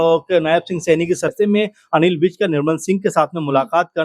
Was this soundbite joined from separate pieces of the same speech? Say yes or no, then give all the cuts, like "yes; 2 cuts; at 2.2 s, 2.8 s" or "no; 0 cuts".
yes; 1 cut; at 1.3 s